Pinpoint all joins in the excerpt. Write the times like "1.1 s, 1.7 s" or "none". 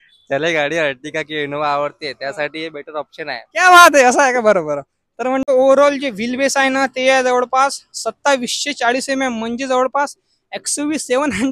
5.4 s